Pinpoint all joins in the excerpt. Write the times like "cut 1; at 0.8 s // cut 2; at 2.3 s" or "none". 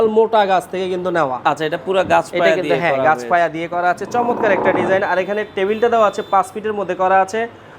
none